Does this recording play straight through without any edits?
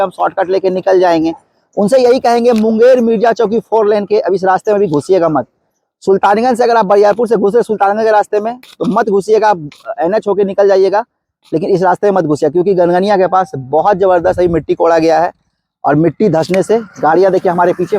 yes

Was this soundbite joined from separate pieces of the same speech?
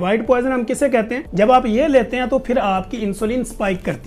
yes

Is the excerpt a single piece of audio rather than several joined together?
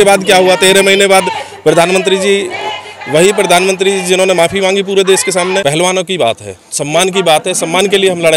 no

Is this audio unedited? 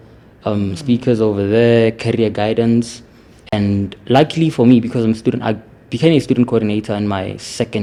yes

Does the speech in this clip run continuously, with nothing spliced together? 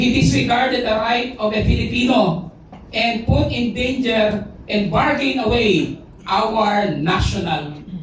yes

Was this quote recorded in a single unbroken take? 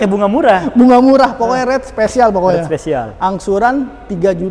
yes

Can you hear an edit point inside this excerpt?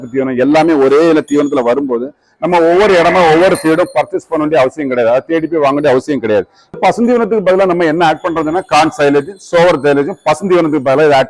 yes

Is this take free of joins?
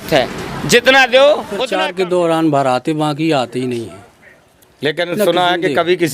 no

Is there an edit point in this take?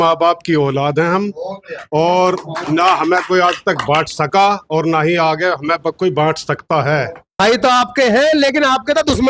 yes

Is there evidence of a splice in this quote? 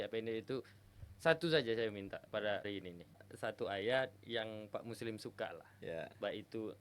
yes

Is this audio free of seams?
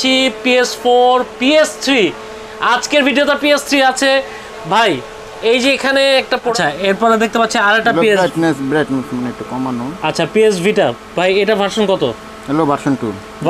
no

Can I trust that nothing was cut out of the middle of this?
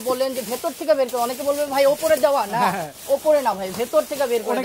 yes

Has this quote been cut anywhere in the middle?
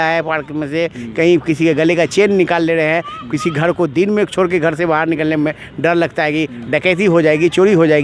no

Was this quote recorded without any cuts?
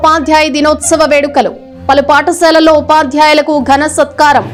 yes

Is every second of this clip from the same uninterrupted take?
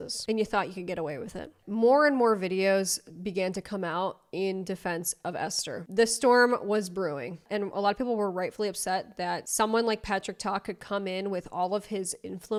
yes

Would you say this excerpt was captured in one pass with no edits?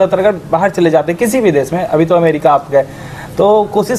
yes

